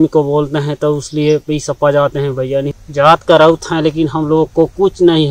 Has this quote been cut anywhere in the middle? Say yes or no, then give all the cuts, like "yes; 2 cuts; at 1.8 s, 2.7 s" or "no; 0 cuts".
yes; 1 cut; at 2.8 s